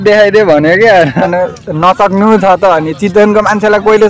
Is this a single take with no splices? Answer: no; 1 cut; at 1.2 s

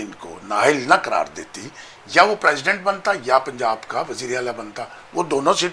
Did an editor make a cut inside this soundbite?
no; 0 cuts

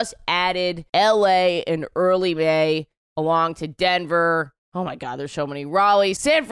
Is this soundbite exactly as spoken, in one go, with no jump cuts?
yes; 0 cuts

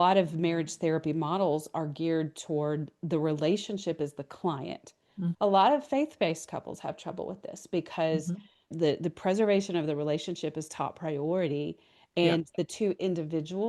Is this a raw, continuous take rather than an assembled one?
no; 2 cuts; at 5.3 s, 8.7 s

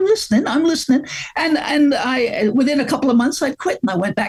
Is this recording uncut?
yes; 0 cuts

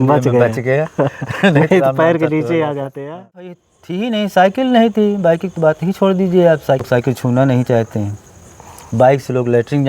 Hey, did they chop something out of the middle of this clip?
yes; 2 cuts; at 3.4 s, 6.8 s

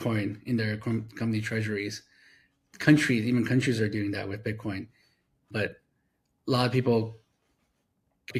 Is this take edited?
no; 0 cuts

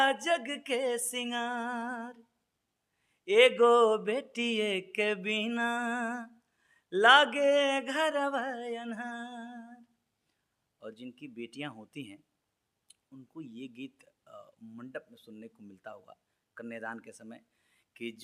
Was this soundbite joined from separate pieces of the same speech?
no; 0 cuts

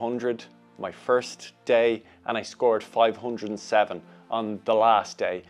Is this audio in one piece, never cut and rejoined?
yes; 0 cuts

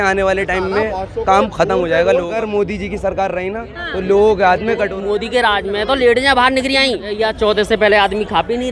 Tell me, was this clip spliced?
yes; 3 cuts; at 2.3 s, 5.0 s, 7.2 s

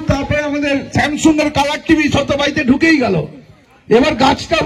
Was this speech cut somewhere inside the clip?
no; 0 cuts

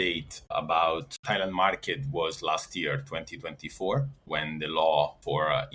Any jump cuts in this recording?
yes; 1 cut; at 1.1 s

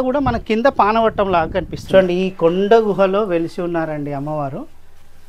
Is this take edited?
yes; 1 cut; at 1.8 s

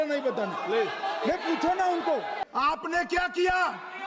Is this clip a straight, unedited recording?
no; 1 cut; at 2.4 s

